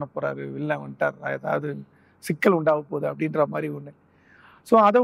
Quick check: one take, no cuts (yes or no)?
yes